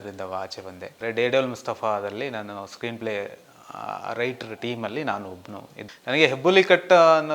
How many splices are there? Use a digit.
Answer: 2